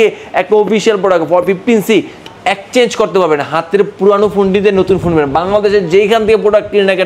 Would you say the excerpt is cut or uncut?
cut